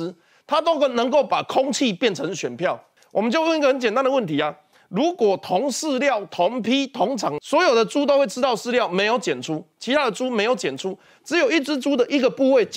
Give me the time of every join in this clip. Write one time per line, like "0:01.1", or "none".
0:07.4